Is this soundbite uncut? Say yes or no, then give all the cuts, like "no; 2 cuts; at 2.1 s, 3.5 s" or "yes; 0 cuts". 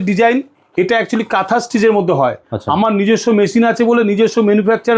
yes; 0 cuts